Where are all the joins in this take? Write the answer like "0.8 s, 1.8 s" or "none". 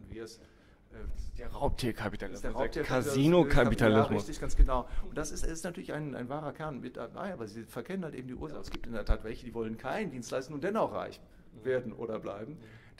8.6 s